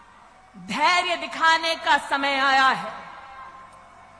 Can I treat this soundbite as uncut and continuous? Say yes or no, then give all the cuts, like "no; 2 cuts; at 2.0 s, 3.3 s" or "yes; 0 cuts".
yes; 0 cuts